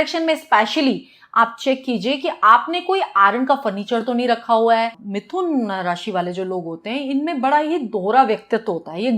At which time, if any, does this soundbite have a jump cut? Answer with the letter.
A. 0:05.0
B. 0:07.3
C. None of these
A